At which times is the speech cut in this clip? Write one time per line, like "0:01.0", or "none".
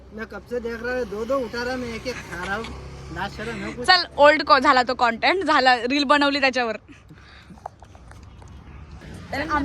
none